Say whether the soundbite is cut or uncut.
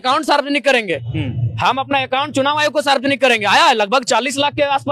uncut